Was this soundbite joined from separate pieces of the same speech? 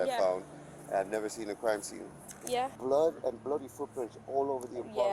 yes; 1 cut; at 2.8 s

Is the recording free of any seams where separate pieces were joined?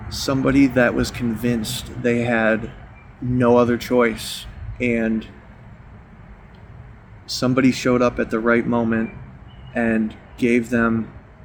yes; 0 cuts

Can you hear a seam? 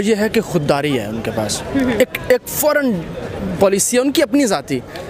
no; 0 cuts

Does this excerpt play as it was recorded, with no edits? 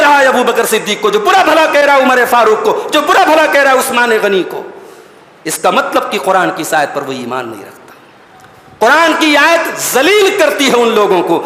yes; 0 cuts

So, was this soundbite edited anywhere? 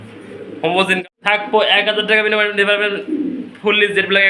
yes; 1 cut; at 1.0 s

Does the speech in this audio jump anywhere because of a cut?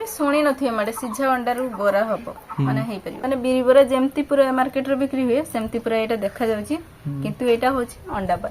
yes; 1 cut; at 3.2 s

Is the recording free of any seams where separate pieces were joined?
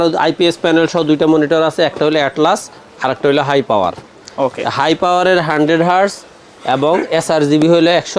yes; 0 cuts

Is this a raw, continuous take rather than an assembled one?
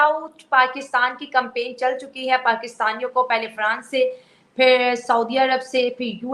yes; 0 cuts

